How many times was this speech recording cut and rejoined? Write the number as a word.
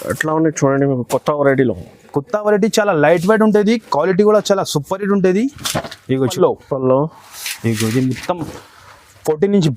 one